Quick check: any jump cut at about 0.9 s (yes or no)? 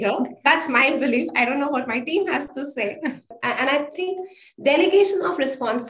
no